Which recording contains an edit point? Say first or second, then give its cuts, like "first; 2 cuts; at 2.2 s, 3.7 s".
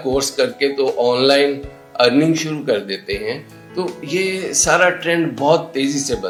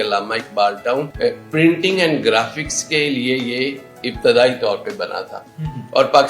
second; 1 cut; at 1.1 s